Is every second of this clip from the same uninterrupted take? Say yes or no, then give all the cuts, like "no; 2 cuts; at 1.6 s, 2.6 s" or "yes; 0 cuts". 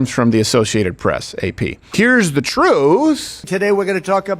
no; 2 cuts; at 1.8 s, 3.3 s